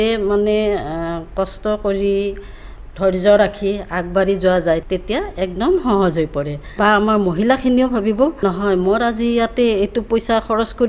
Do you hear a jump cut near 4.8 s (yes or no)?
yes